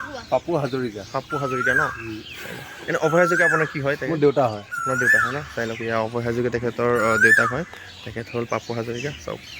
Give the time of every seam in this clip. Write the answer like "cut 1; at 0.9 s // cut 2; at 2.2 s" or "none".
none